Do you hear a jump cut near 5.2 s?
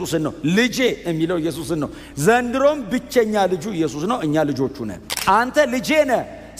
yes; 1 cut; at 5.2 s

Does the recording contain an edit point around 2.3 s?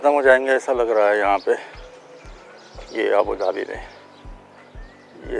no; 0 cuts

